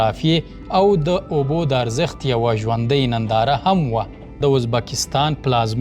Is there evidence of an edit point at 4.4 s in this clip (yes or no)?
yes